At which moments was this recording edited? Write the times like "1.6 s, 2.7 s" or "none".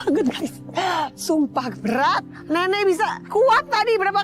2.3 s, 3.2 s